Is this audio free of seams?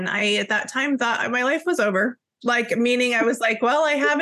yes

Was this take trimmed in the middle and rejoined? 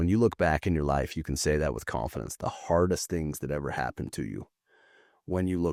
no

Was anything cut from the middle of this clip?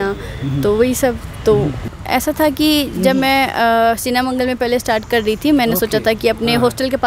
yes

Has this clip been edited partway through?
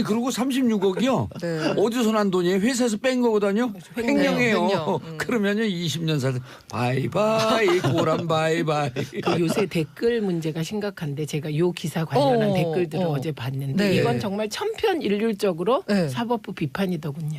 yes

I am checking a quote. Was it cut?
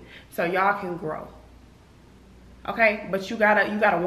no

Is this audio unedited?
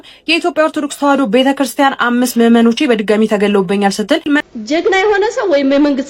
no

